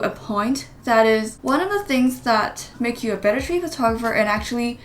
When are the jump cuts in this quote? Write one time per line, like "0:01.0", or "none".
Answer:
0:01.3